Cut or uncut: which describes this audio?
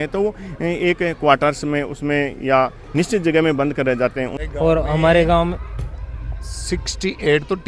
cut